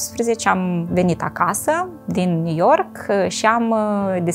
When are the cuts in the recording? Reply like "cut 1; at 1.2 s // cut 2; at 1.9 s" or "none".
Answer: none

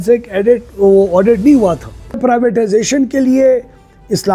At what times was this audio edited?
cut 1; at 2.2 s

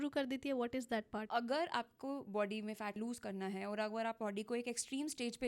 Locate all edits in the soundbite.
cut 1; at 1.3 s // cut 2; at 3.0 s

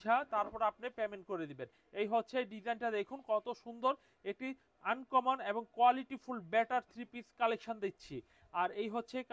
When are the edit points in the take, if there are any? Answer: none

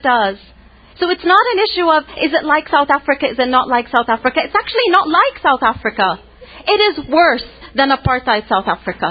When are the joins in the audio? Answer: none

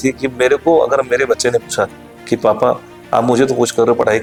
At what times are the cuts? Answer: none

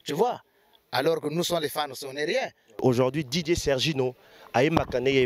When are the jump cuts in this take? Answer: cut 1; at 2.7 s

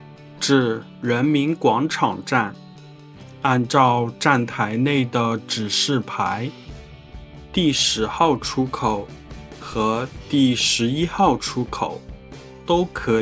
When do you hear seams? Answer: none

